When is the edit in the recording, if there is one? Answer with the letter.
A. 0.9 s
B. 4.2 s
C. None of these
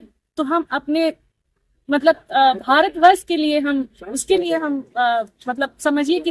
C